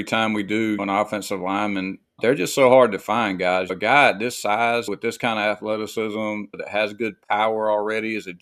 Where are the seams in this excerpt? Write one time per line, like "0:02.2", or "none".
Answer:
0:00.8
0:02.2
0:03.7
0:04.9
0:06.6